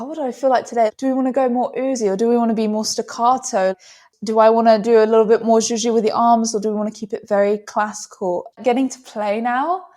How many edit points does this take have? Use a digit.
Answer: 3